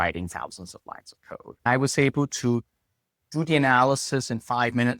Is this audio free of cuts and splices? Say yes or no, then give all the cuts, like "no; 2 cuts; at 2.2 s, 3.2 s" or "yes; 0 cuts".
no; 1 cut; at 1.7 s